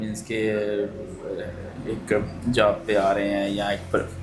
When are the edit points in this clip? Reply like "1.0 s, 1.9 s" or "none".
none